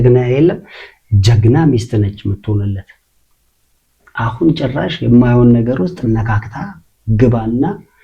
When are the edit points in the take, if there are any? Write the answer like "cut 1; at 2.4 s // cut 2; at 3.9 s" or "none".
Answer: none